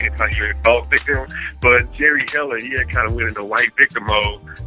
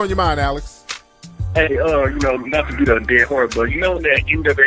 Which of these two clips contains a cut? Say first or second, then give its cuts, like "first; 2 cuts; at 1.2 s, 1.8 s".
second; 1 cut; at 2.1 s